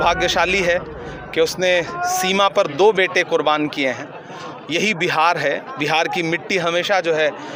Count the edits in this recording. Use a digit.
0